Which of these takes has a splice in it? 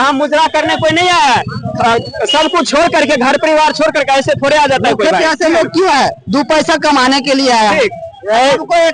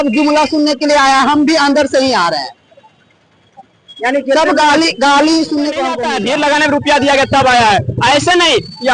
second; 1 cut; at 6.0 s

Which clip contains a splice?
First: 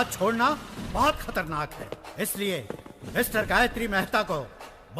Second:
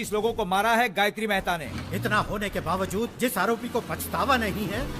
second; 1 cut; at 1.6 s

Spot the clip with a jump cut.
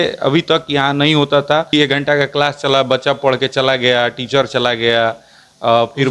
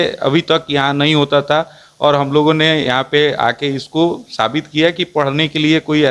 first; 1 cut; at 1.7 s

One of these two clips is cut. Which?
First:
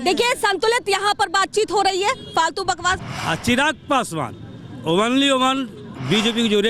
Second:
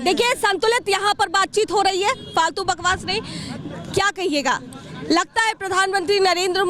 first; 1 cut; at 3.0 s

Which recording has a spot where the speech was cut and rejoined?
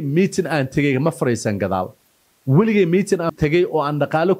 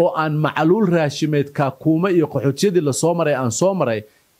first; 1 cut; at 3.3 s

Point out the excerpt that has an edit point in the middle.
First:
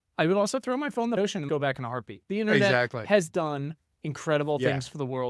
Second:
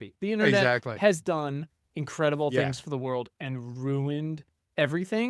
first; 1 cut; at 1.2 s

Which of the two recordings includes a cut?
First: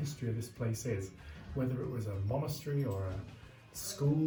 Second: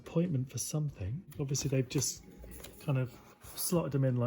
second; 1 cut; at 1.3 s

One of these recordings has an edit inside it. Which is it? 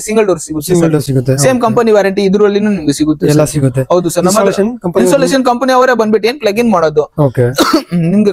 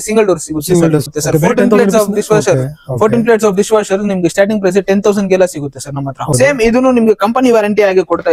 second; 2 cuts; at 1.1 s, 6.3 s

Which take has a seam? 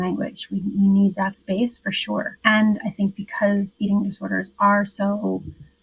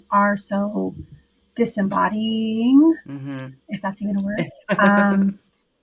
first; 1 cut; at 2.4 s

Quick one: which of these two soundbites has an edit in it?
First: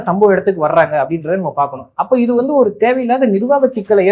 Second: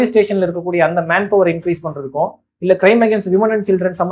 first; 1 cut; at 1.9 s

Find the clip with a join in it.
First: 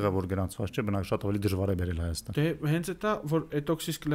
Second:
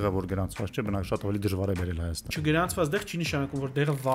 second; 1 cut; at 2.3 s

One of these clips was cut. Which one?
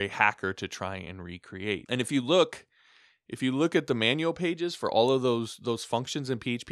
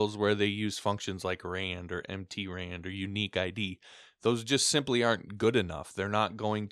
first; 1 cut; at 1.8 s

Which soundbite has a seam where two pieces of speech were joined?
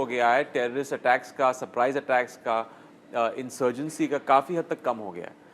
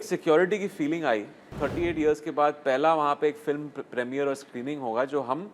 second; 1 cut; at 1.5 s

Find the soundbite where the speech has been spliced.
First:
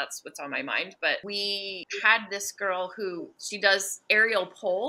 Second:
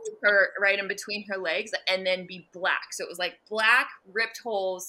first; 2 cuts; at 1.8 s, 3.4 s

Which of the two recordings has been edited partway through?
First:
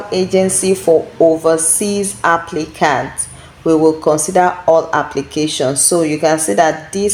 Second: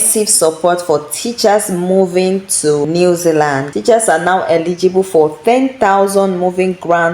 second; 2 cuts; at 2.9 s, 3.7 s

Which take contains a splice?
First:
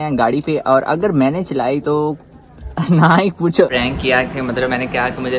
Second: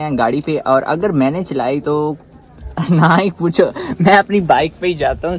first; 1 cut; at 3.7 s

